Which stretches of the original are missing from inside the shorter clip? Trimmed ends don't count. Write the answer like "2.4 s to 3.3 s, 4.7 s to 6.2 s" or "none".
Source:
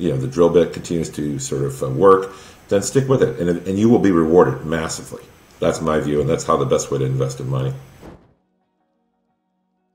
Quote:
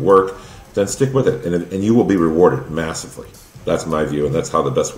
none